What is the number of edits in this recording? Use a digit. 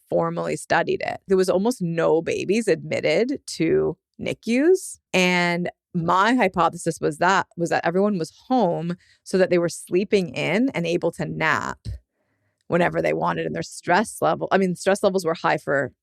2